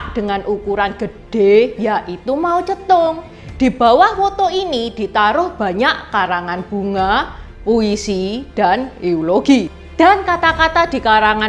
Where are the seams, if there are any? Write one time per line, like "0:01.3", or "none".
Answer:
0:09.8

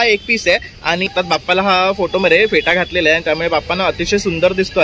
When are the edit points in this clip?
0:01.1

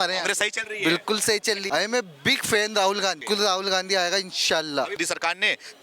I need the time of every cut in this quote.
0:01.6
0:03.2
0:05.0

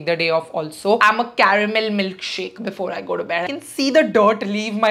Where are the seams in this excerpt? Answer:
0:01.0
0:03.5

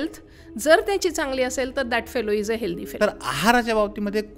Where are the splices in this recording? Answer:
0:02.8

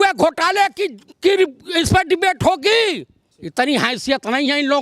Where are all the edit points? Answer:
none

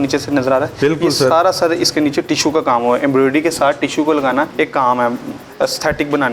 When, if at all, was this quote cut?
0:04.5
0:05.4

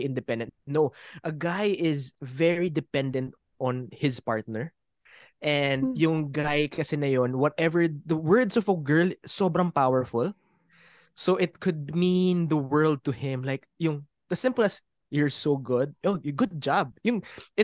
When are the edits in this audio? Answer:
none

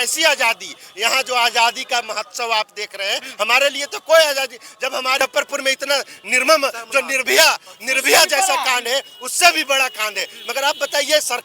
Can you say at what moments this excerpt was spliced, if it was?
0:05.2

